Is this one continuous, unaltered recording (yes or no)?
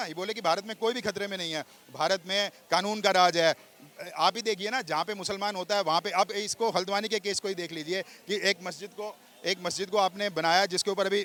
yes